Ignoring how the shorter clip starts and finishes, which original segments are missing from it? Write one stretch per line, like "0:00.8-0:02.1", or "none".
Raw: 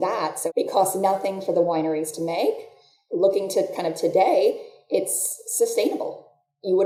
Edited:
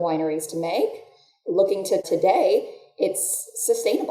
0:03.7-0:04.0